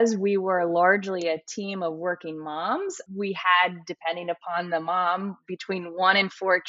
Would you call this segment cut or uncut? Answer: cut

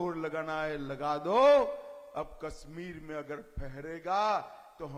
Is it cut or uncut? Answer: uncut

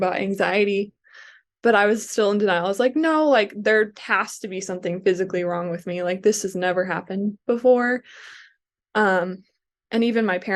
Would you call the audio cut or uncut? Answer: uncut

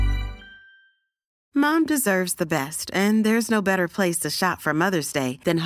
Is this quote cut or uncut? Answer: uncut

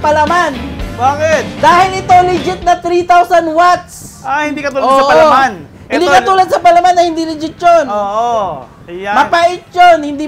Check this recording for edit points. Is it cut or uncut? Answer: cut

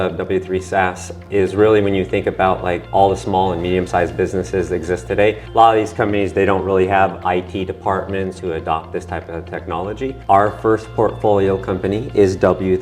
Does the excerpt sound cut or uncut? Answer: cut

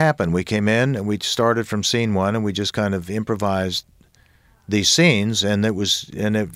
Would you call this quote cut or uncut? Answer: uncut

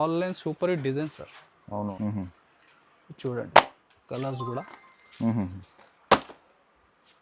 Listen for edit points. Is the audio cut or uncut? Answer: cut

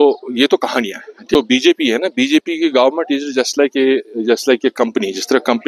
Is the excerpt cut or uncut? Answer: cut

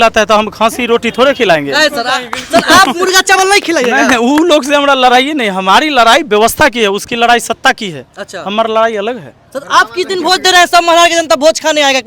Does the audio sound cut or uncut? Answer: uncut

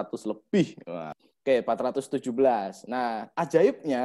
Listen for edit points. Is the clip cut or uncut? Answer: cut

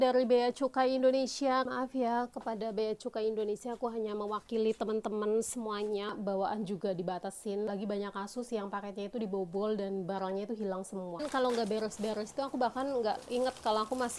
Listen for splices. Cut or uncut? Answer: cut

